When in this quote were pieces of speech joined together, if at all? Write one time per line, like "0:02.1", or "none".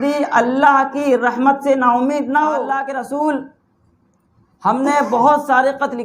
0:02.8